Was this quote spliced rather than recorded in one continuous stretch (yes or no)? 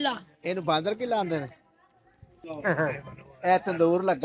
yes